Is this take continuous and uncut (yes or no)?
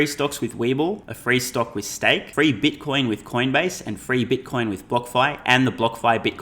no